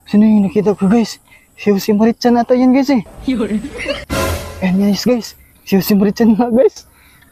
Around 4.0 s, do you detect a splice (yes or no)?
yes